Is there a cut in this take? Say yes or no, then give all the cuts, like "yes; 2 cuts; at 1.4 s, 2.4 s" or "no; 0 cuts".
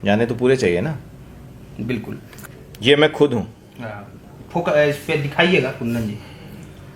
yes; 1 cut; at 2.3 s